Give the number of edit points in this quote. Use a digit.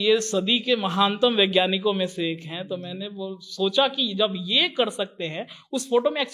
0